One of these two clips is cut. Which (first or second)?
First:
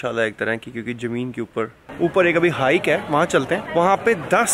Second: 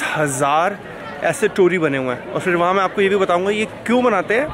first